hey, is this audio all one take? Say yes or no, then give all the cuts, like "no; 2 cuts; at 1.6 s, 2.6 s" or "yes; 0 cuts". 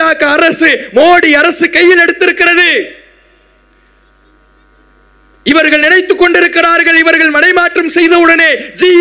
yes; 0 cuts